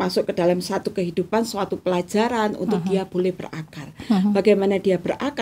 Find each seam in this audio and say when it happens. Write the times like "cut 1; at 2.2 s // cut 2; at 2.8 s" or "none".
none